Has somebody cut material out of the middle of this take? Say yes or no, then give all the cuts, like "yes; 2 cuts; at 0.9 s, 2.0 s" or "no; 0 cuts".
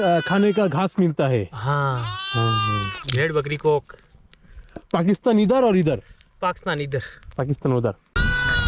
no; 0 cuts